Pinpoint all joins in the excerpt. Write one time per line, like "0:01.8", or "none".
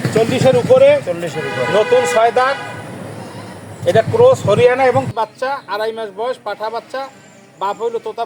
0:05.1